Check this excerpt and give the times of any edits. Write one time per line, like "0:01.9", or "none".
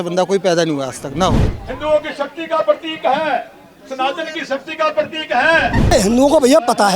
0:01.4
0:05.9